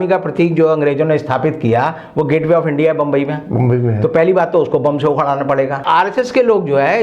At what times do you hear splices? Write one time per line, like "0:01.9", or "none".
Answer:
0:05.8